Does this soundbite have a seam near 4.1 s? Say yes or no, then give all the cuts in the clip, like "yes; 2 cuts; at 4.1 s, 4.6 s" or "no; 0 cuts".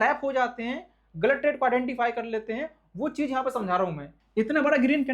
yes; 1 cut; at 4.1 s